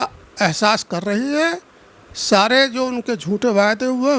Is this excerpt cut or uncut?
uncut